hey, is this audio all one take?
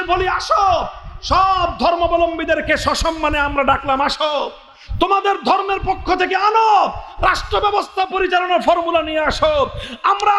yes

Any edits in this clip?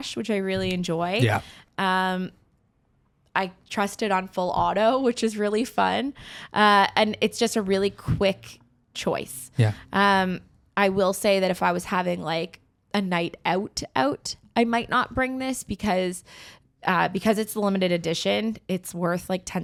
no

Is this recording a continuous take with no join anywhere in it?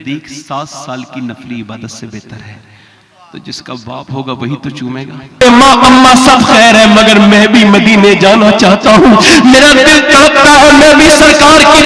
no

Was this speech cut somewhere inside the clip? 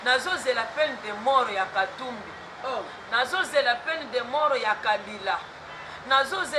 no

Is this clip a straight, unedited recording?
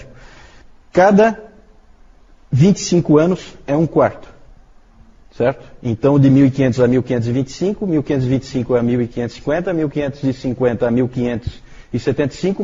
yes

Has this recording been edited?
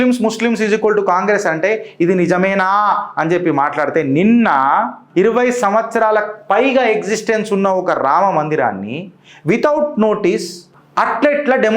yes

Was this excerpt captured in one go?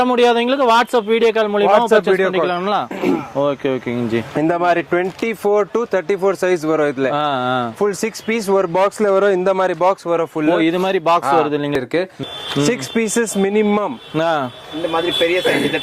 no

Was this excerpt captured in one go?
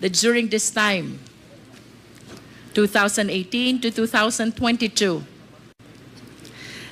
yes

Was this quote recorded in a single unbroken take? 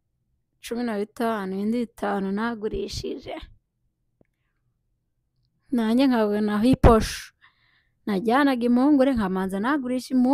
yes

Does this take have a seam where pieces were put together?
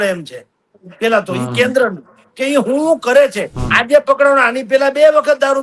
yes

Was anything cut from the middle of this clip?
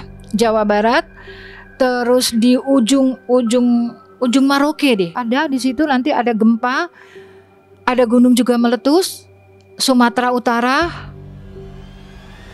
no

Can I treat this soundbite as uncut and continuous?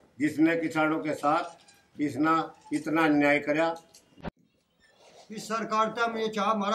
no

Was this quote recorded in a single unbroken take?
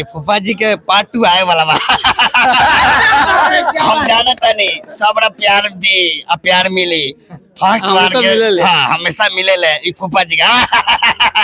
yes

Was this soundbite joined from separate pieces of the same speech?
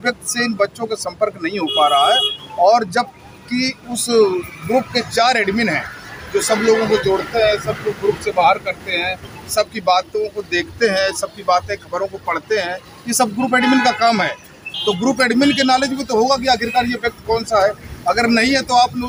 no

